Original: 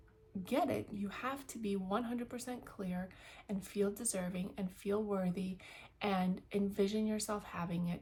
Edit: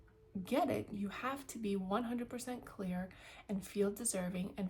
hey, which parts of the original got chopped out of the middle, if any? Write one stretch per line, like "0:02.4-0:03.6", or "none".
none

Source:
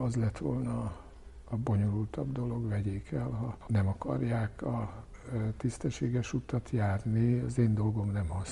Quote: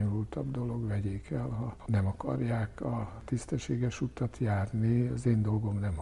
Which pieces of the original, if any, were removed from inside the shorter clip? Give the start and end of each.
0:05.0-0:05.6

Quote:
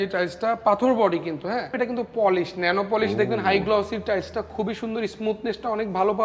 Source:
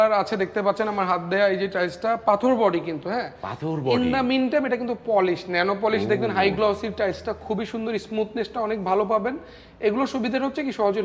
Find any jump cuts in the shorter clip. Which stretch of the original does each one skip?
0:03.4-0:04.7

